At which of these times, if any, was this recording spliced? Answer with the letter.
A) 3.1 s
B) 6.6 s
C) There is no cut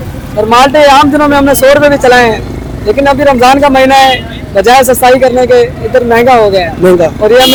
C